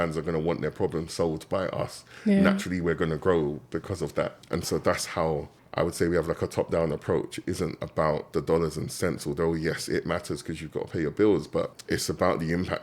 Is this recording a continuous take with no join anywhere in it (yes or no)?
no